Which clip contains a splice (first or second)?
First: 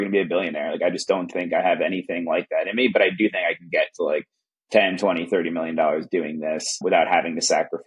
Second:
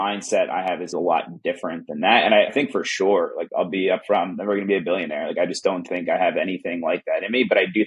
second